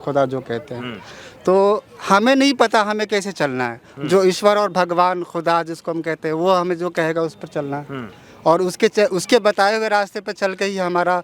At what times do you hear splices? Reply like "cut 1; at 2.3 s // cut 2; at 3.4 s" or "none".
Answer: none